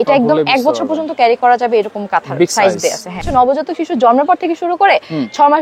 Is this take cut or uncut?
cut